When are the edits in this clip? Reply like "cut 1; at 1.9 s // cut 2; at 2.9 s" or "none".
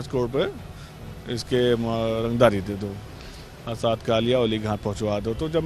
none